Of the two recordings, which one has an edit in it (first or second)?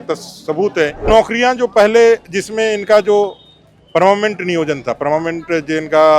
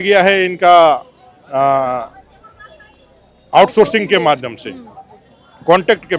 first